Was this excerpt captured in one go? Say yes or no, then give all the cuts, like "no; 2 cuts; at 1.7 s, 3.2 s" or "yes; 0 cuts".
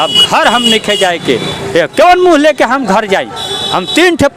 yes; 0 cuts